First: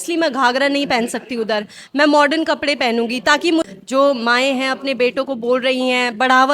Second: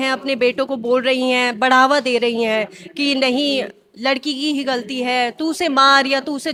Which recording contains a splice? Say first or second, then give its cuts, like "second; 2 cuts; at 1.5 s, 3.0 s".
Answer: first; 1 cut; at 3.7 s